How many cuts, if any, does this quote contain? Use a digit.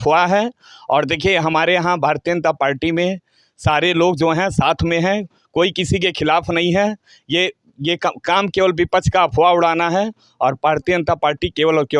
0